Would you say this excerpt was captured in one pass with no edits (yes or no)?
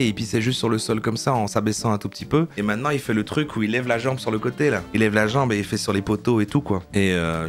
yes